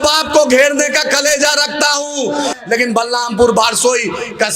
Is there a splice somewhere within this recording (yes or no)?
yes